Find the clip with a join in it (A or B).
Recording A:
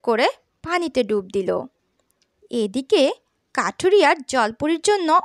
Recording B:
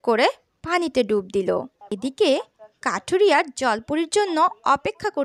A